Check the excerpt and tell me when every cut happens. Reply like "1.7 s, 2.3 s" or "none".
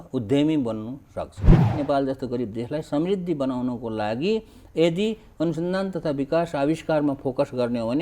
1.7 s